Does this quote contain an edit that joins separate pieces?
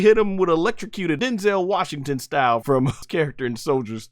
yes; 2 cuts; at 1.2 s, 2.9 s

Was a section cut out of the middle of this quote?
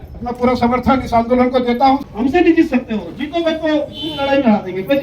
yes; 1 cut; at 2.1 s

